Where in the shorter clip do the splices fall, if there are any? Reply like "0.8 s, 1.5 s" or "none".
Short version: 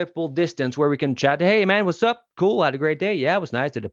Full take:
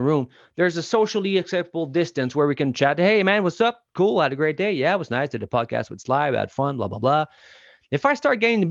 none